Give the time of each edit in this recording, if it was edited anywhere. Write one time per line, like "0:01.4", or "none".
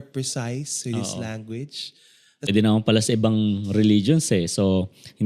0:02.5